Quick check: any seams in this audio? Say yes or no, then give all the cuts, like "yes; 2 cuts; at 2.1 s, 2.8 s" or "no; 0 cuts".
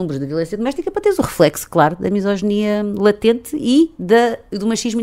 no; 0 cuts